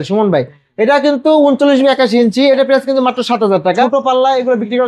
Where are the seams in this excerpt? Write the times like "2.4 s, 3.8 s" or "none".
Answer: 3.8 s

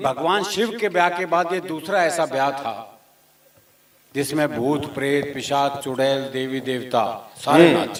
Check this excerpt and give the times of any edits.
none

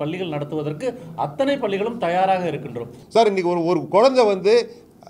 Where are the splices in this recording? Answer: 3.0 s

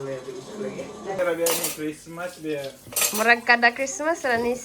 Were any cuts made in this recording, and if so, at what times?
1.2 s

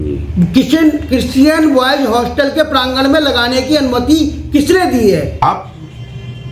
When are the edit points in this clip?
5.4 s

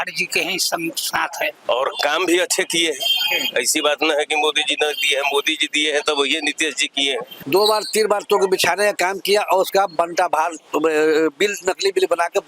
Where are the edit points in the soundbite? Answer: 1.6 s, 7.3 s

